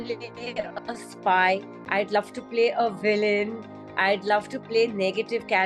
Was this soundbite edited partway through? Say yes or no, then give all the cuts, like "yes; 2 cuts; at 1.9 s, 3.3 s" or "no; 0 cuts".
no; 0 cuts